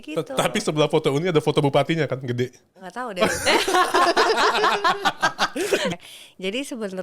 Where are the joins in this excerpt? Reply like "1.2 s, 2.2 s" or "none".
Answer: 5.9 s